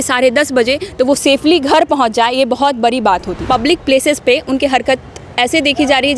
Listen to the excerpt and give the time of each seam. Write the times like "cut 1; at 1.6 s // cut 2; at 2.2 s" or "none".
cut 1; at 3.3 s

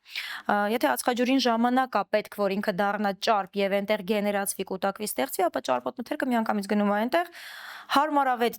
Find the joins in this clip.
none

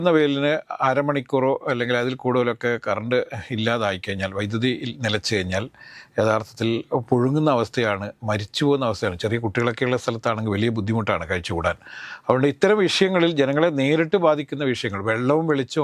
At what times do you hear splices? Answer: none

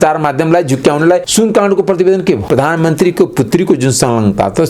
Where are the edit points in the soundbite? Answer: cut 1; at 1.3 s // cut 2; at 2.4 s

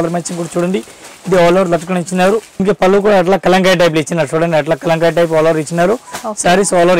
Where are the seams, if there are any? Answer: cut 1; at 2.6 s

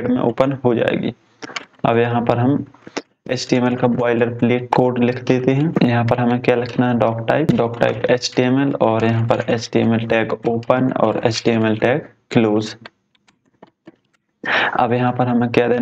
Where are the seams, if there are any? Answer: cut 1; at 4.7 s // cut 2; at 5.7 s // cut 3; at 7.5 s

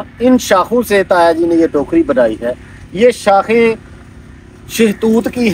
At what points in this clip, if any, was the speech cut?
none

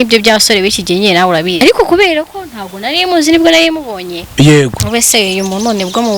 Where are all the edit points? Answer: cut 1; at 1.6 s

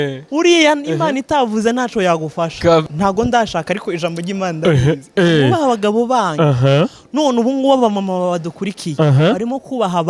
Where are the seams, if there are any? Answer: cut 1; at 2.8 s

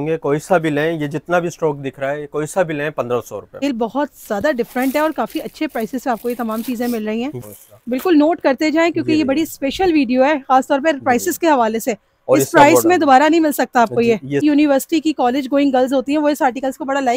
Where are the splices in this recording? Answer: cut 1; at 3.6 s // cut 2; at 7.4 s // cut 3; at 14.4 s

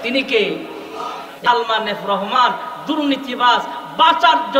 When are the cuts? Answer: cut 1; at 1.1 s

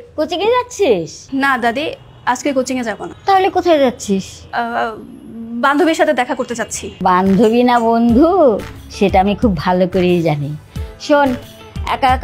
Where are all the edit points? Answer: cut 1; at 1.2 s // cut 2; at 3.1 s // cut 3; at 4.4 s // cut 4; at 6.8 s

